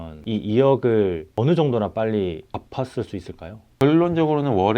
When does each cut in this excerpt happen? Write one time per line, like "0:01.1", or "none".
0:01.3
0:02.4
0:03.7